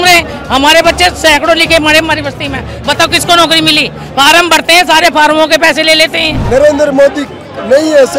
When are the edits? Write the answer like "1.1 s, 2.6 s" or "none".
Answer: 6.3 s